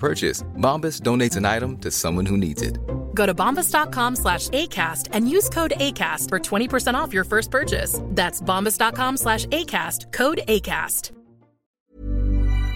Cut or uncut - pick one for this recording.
cut